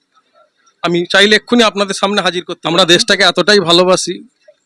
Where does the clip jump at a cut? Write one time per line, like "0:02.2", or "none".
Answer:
0:02.5